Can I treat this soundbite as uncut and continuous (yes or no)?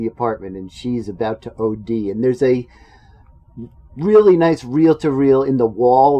yes